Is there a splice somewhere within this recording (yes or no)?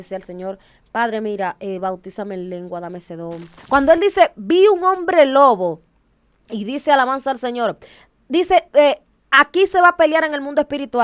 yes